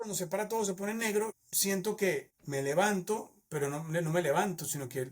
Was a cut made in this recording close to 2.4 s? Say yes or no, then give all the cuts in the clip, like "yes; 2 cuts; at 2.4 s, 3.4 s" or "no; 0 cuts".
yes; 1 cut; at 2.4 s